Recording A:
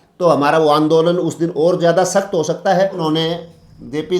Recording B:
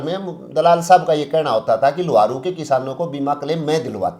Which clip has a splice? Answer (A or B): A